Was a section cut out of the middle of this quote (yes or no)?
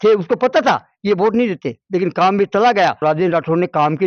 no